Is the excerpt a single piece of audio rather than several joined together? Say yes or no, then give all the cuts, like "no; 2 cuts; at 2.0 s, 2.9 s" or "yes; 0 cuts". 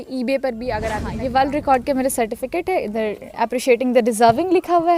no; 1 cut; at 0.9 s